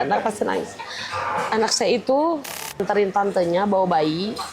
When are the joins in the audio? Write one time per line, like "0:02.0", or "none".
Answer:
0:02.8